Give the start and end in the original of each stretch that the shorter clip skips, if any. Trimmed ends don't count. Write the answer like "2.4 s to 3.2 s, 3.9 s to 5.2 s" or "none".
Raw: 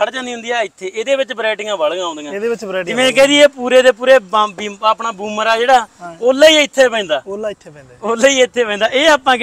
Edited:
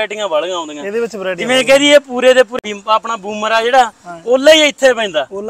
4.0 s to 4.5 s

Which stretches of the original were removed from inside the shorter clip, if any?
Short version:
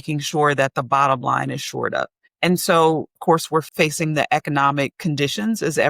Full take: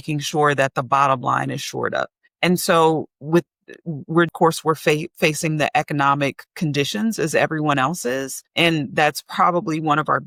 3.3 s to 4.7 s, 6.4 s to 6.5 s

